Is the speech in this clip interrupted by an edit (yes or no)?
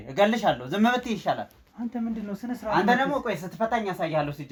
no